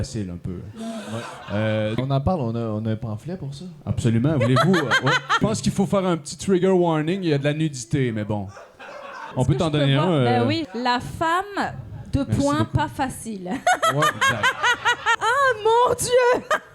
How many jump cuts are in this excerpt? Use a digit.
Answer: 5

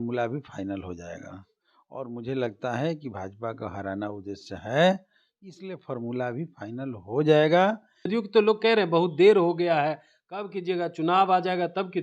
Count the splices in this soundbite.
1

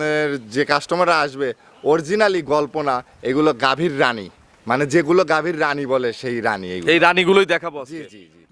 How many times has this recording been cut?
0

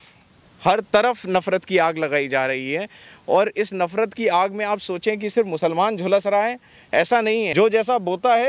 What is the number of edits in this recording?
1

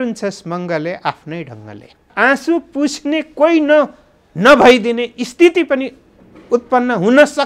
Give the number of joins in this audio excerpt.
1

